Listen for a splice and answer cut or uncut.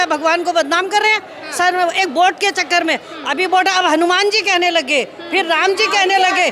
uncut